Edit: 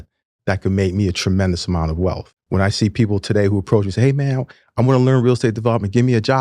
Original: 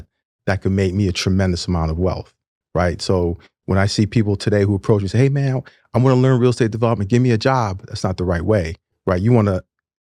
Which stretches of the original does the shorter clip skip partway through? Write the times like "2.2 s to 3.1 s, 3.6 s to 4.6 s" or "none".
2.3 s to 3.5 s